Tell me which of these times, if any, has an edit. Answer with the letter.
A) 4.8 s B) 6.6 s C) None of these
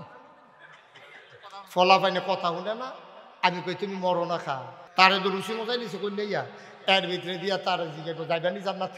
A